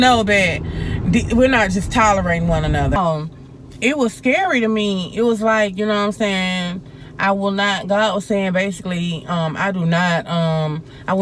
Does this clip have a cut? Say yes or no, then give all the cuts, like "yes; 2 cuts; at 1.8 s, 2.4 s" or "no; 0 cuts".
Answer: yes; 1 cut; at 3.0 s